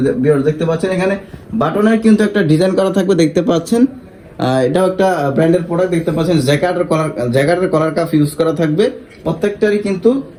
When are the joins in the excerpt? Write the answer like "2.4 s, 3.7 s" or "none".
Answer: none